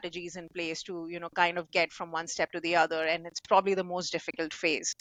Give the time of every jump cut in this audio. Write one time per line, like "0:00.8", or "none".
none